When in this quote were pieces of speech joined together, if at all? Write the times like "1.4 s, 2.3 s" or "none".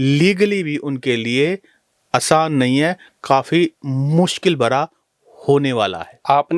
none